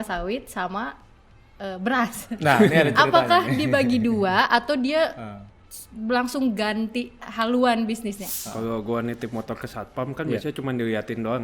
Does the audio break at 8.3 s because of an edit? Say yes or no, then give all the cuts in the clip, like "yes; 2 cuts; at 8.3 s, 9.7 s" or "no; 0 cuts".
yes; 1 cut; at 8.3 s